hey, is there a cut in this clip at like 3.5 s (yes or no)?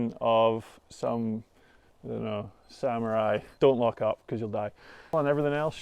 yes